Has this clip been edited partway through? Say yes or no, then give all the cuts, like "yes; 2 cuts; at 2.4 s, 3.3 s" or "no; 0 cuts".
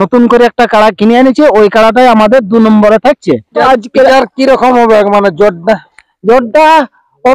yes; 1 cut; at 3.5 s